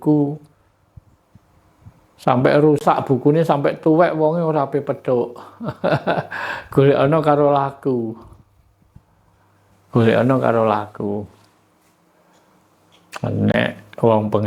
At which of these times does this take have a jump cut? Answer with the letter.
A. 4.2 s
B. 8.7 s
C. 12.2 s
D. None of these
D